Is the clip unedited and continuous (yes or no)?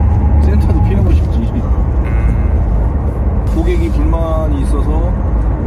no